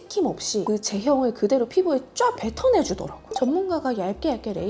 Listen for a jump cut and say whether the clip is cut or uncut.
cut